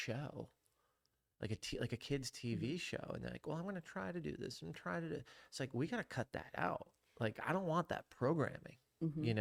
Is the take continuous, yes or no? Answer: yes